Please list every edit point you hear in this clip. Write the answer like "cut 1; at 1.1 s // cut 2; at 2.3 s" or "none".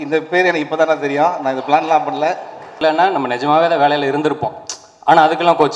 cut 1; at 2.8 s